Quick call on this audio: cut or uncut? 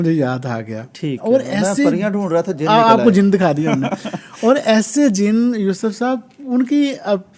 uncut